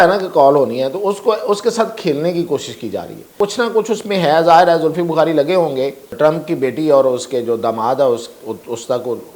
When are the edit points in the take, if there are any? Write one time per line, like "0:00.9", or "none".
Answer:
0:03.3
0:06.0